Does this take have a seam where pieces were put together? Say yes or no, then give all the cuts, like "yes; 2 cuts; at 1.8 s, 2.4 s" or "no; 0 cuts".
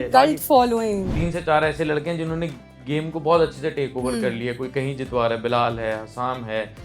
yes; 1 cut; at 1.1 s